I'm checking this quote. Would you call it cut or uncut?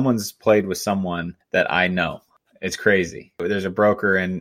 cut